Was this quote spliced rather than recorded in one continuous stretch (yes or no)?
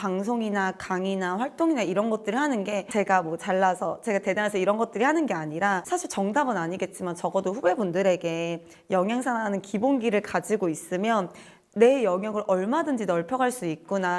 no